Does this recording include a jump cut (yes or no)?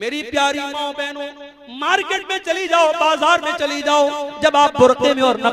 no